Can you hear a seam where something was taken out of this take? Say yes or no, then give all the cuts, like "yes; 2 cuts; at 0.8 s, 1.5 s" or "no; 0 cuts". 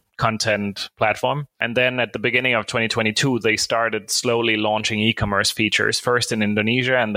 yes; 1 cut; at 1.6 s